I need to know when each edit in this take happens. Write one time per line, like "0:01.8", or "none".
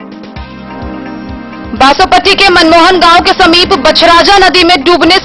0:01.7